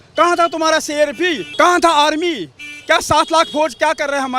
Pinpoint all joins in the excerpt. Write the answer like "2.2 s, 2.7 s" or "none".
1.4 s